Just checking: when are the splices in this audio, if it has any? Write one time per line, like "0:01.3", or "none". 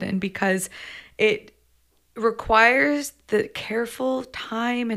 none